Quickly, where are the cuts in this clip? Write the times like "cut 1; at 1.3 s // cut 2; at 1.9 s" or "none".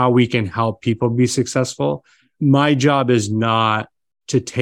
cut 1; at 2.3 s